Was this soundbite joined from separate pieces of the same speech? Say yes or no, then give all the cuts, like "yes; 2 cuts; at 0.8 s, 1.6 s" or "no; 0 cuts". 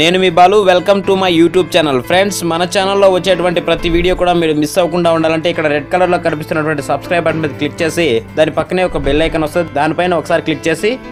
no; 0 cuts